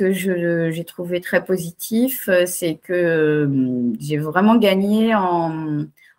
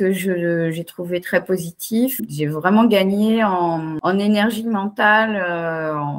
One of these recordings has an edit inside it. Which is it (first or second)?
second